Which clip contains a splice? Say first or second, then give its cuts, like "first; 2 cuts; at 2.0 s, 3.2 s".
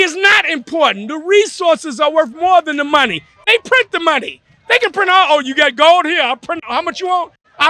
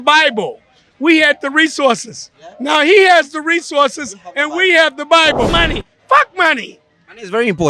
second; 1 cut; at 5.5 s